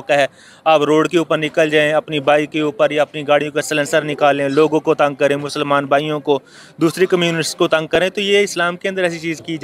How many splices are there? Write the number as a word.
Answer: zero